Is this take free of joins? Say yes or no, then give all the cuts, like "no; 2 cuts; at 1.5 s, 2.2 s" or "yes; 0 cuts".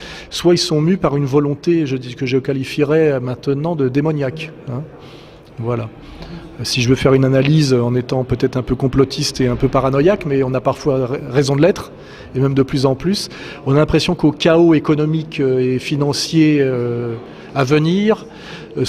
yes; 0 cuts